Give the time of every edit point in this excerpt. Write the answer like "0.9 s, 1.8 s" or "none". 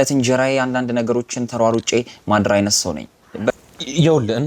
3.5 s